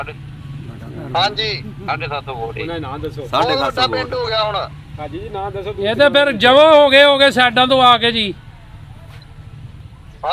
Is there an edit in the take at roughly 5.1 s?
no; 0 cuts

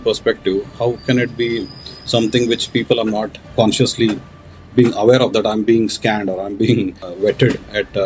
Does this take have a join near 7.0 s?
yes; 2 cuts; at 3.4 s, 7.0 s

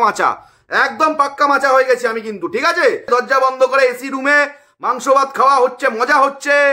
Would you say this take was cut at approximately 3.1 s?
yes; 1 cut; at 3.1 s

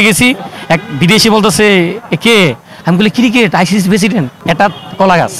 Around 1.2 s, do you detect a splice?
no; 2 cuts; at 2.7 s, 4.4 s

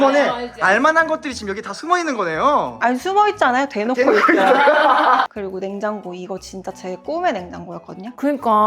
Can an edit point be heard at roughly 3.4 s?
no; 1 cut; at 5.2 s

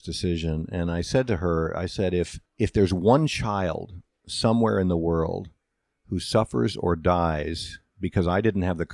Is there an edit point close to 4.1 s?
no; 1 cut; at 2.4 s

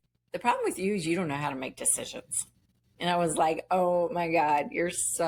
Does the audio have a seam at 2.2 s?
no; 0 cuts

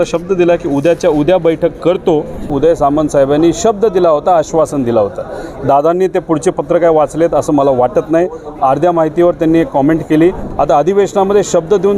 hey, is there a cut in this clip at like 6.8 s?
no; 2 cuts; at 2.5 s, 10.4 s

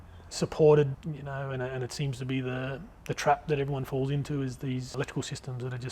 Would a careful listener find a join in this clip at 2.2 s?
no; 2 cuts; at 1.0 s, 4.9 s

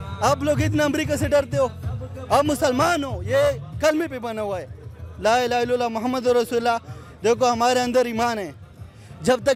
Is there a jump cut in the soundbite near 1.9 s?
no; 0 cuts

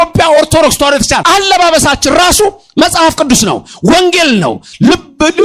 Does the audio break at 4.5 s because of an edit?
no; 1 cut; at 1.2 s

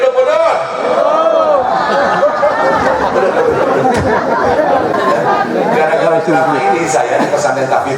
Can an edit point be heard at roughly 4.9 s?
yes; 1 cut; at 4.9 s

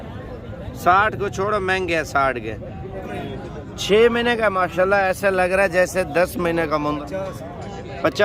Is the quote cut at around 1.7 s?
no; 2 cuts; at 3.0 s, 7.0 s

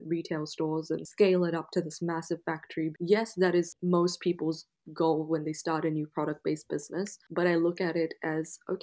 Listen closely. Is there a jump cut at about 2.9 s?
yes; 4 cuts; at 1.1 s, 2.9 s, 3.8 s, 7.2 s

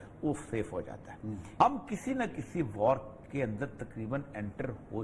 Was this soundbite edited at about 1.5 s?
yes; 1 cut; at 1.5 s

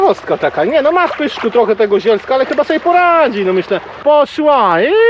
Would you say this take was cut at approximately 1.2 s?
no; 1 cut; at 4.0 s

